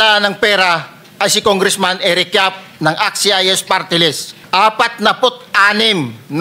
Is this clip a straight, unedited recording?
no; 1 cut; at 4.3 s

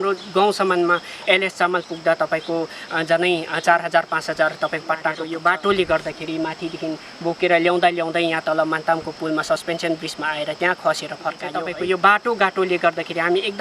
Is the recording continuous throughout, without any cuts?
no; 2 cuts; at 5.2 s, 11.6 s

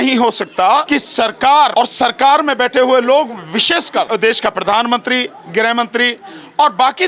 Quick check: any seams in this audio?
yes; 3 cuts; at 0.9 s, 1.7 s, 4.1 s

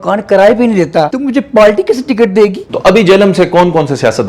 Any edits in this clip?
yes; 2 cuts; at 1.1 s, 2.7 s

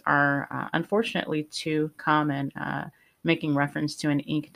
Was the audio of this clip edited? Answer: no; 0 cuts

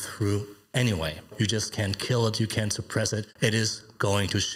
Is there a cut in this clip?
yes; 2 cuts; at 1.3 s, 3.3 s

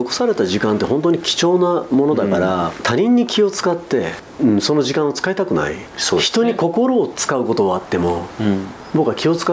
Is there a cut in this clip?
yes; 3 cuts; at 2.8 s, 4.2 s, 5.8 s

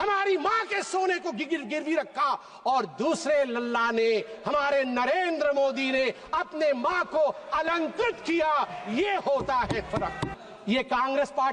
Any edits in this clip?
yes; 1 cut; at 10.3 s

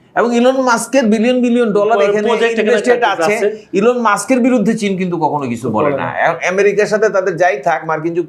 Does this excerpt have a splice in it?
no; 0 cuts

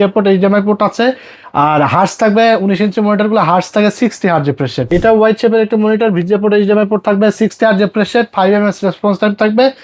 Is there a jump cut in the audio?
yes; 1 cut; at 4.9 s

